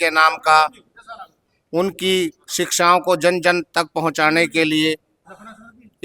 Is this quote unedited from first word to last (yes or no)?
yes